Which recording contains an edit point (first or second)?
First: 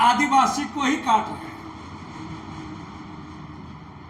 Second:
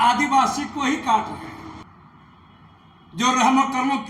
second